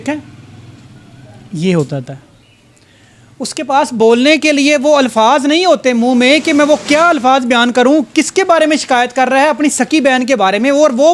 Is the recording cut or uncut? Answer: uncut